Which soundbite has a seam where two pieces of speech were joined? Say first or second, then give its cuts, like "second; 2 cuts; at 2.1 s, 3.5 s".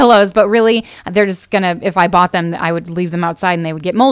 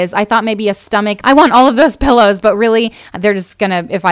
second; 1 cut; at 1.2 s